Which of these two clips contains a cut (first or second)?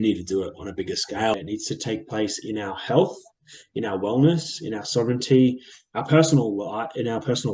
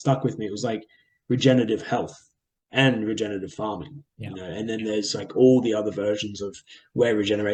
first